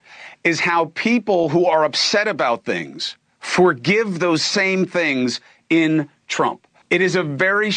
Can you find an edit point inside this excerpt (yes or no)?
yes